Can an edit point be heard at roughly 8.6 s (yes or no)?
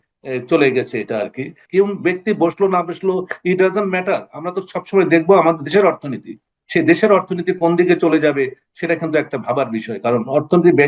no